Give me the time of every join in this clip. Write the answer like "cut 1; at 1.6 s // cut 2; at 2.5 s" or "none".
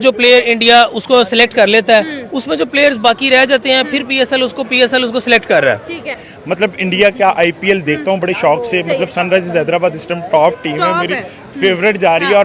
cut 1; at 6.2 s